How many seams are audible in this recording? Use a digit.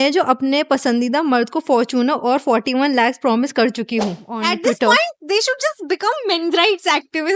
1